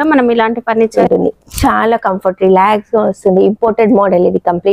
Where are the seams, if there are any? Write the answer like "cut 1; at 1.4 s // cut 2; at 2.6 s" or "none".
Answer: cut 1; at 0.9 s